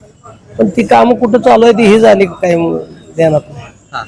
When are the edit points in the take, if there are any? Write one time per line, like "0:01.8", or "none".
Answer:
none